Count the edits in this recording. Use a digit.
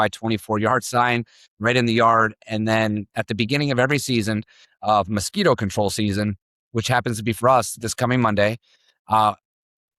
0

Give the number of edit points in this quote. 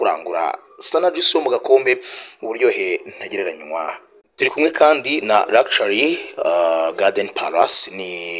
1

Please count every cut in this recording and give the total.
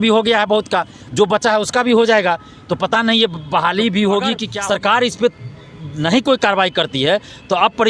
1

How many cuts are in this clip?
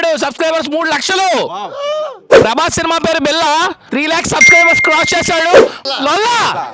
2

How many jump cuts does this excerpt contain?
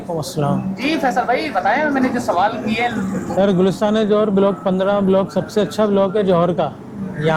0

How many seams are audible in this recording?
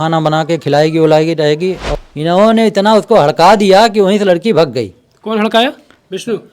1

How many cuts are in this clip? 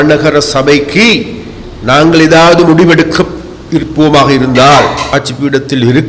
1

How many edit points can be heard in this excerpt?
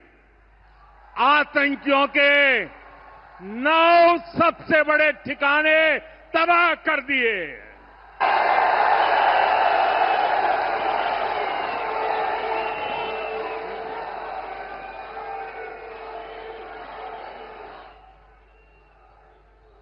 0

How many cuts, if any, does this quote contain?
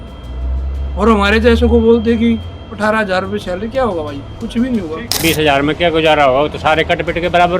1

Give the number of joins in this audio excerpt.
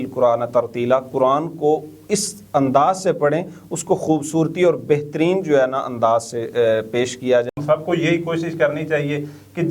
1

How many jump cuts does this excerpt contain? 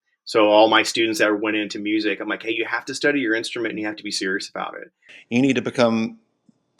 1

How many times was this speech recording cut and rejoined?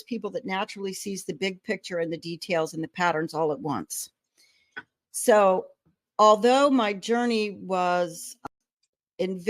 1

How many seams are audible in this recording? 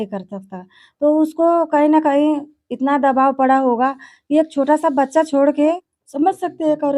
1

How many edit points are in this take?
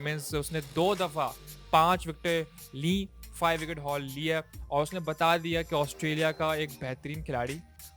0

